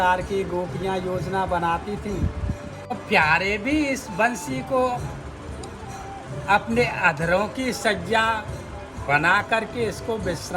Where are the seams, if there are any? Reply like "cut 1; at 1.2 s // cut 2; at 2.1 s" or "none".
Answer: cut 1; at 2.8 s